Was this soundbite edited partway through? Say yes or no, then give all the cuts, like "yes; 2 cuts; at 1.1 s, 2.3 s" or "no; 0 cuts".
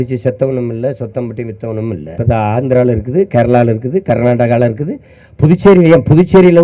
yes; 1 cut; at 2.1 s